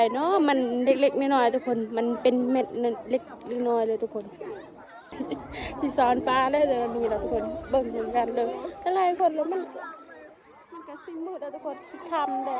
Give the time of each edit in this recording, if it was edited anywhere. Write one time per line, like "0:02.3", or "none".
0:05.1

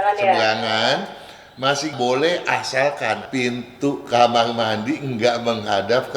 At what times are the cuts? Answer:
0:03.2

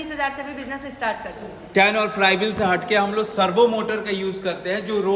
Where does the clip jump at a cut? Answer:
0:01.6

